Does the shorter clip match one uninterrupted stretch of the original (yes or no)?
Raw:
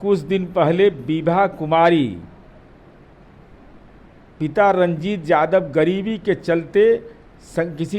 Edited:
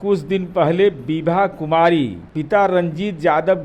no